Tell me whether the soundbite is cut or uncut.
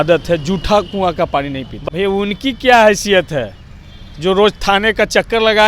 cut